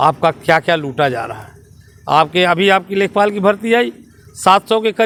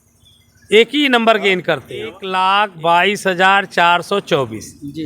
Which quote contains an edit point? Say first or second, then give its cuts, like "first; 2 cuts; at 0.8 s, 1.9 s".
second; 1 cut; at 2.2 s